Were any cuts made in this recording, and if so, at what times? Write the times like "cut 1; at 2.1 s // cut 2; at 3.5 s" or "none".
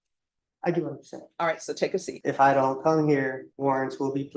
cut 1; at 2.1 s // cut 2; at 3.5 s